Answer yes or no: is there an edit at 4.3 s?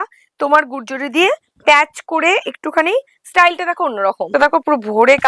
yes